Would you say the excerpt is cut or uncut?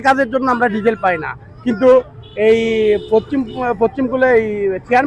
uncut